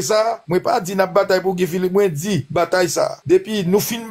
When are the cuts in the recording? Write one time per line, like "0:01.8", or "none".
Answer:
none